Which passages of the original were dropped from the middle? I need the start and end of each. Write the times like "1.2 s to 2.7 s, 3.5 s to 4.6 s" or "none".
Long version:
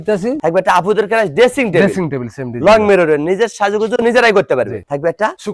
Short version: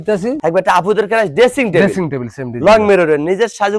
none